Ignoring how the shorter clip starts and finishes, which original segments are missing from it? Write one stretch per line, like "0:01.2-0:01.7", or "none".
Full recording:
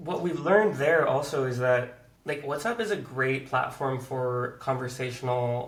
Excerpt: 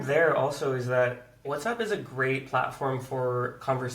0:02.1-0:02.4